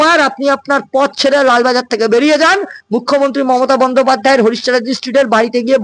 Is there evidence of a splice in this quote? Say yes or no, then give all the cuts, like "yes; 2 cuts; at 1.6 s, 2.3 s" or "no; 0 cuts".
no; 0 cuts